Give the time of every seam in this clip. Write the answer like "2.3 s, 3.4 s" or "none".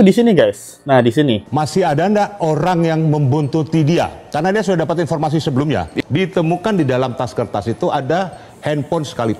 1.4 s, 5.9 s